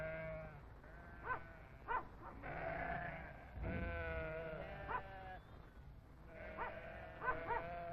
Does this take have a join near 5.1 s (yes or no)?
no